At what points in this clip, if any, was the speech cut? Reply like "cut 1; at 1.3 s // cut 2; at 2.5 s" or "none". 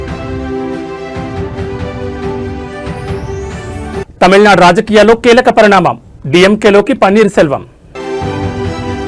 cut 1; at 3.7 s // cut 2; at 8.0 s

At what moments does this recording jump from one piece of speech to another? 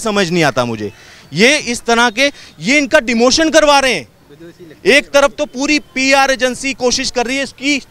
none

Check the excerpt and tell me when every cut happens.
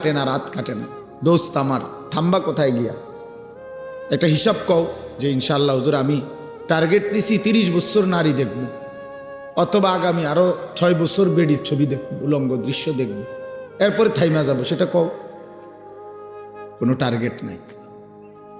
cut 1; at 17.6 s

